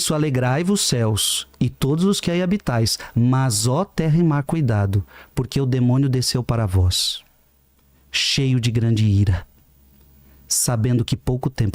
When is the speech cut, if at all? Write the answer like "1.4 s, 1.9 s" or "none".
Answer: none